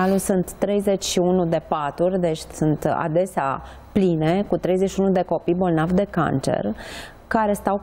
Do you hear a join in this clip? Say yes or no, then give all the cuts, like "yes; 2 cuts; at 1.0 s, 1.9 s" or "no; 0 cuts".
no; 0 cuts